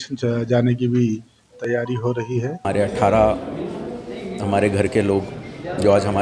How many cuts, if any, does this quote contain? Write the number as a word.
one